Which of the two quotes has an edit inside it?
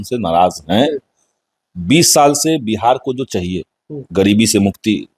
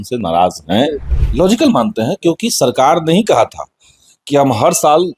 second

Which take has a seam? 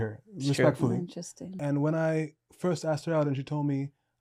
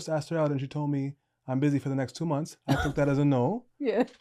first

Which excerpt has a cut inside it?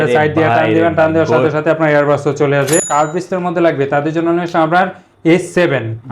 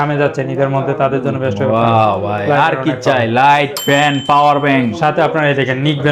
first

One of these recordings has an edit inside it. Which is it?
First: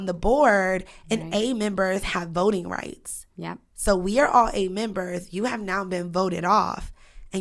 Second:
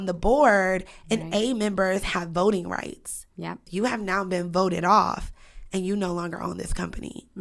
second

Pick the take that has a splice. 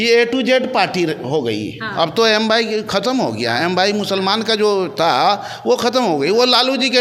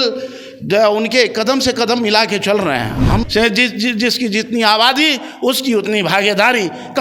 second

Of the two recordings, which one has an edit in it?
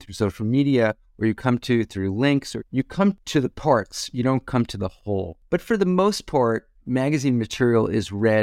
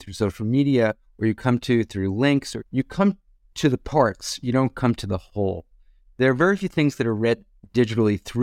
first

